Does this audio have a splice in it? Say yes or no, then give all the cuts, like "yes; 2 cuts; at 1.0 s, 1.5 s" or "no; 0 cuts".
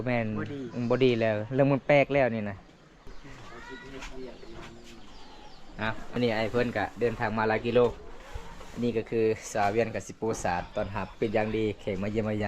yes; 2 cuts; at 3.1 s, 6.1 s